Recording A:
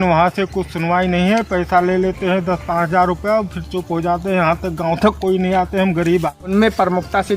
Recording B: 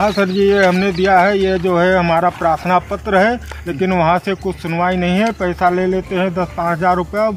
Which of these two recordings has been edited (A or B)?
A